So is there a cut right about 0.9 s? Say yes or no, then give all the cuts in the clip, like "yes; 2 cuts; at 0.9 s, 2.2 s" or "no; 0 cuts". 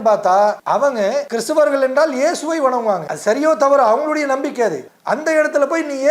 yes; 3 cuts; at 0.9 s, 3.1 s, 4.9 s